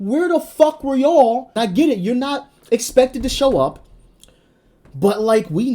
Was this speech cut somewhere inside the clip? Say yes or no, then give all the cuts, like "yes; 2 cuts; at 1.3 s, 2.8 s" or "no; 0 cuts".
yes; 1 cut; at 1.5 s